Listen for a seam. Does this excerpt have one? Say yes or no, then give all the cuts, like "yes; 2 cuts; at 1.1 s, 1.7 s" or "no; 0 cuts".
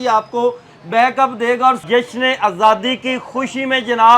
yes; 1 cut; at 1.8 s